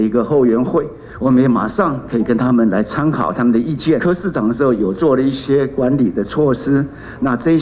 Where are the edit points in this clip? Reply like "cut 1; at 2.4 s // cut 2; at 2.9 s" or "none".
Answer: cut 1; at 4.0 s

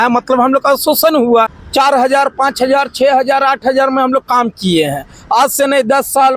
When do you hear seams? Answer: none

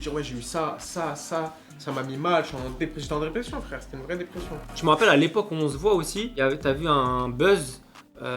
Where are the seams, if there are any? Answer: cut 1; at 4.7 s // cut 2; at 6.2 s

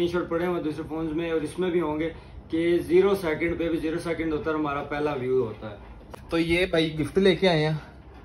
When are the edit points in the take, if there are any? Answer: cut 1; at 5.8 s

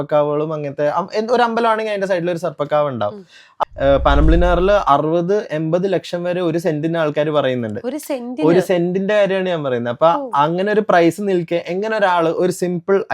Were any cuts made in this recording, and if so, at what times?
cut 1; at 3.5 s

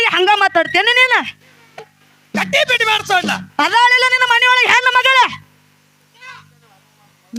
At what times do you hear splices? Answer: none

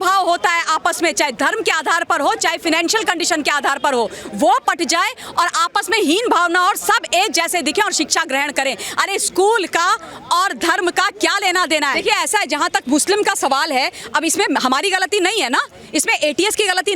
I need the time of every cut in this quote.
cut 1; at 12.0 s

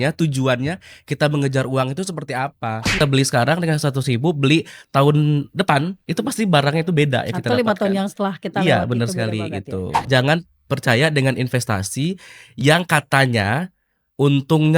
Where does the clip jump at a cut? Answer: cut 1; at 3.0 s // cut 2; at 10.1 s

